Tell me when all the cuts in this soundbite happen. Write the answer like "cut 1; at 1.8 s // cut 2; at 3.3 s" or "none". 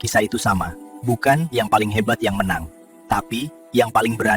none